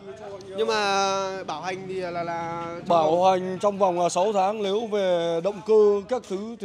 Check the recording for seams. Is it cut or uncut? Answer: uncut